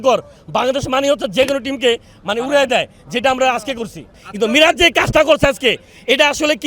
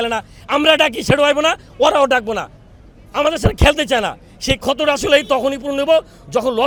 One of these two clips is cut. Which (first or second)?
first